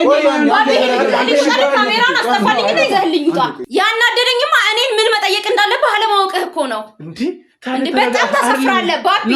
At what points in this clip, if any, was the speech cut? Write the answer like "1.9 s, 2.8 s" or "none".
3.6 s